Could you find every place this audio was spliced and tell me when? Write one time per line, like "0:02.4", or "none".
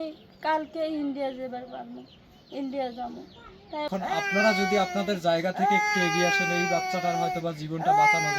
0:03.9